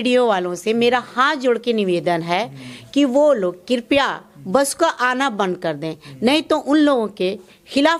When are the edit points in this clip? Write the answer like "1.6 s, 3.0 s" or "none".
none